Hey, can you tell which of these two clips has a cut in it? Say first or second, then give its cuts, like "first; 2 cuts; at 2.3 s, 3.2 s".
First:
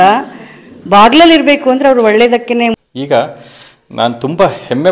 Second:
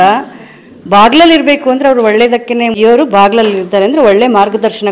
first; 1 cut; at 2.7 s